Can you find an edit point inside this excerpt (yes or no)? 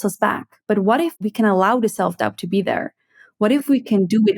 yes